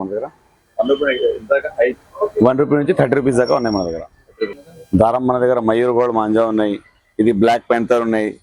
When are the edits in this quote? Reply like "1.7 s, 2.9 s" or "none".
4.6 s